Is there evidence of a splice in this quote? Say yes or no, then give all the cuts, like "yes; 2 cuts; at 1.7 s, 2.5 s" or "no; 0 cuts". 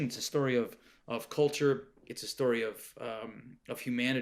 no; 0 cuts